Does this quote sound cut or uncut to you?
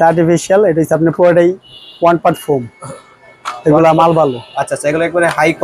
uncut